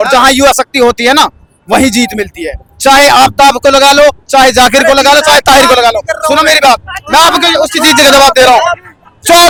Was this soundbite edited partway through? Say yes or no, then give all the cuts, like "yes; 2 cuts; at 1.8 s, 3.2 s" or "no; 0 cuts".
no; 0 cuts